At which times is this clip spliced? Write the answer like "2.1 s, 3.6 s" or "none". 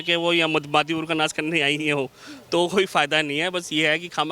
none